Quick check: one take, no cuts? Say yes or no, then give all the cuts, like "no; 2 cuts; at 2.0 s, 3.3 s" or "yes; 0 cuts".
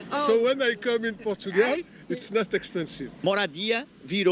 no; 1 cut; at 3.1 s